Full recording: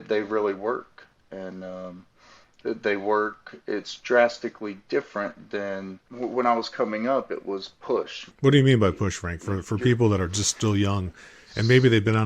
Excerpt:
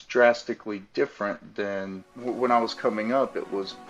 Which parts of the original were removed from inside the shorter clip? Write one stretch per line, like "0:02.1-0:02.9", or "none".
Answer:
none